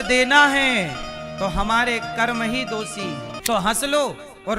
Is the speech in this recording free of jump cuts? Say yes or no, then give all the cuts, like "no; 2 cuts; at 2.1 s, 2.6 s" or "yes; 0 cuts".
no; 1 cut; at 3.3 s